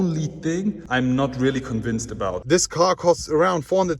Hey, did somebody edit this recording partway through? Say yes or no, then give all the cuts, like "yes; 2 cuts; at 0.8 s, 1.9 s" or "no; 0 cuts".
yes; 1 cut; at 2.4 s